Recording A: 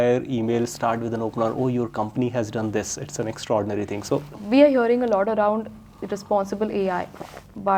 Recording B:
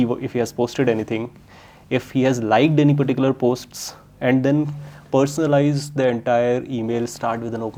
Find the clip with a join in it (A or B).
A